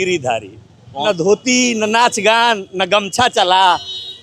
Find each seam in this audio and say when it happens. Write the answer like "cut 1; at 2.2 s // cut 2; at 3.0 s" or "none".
cut 1; at 1.0 s